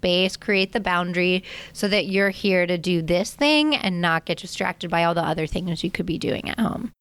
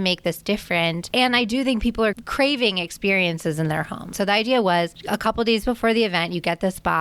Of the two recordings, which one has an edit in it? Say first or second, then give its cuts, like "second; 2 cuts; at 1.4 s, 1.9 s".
second; 4 cuts; at 1.0 s, 2.2 s, 4.1 s, 5.0 s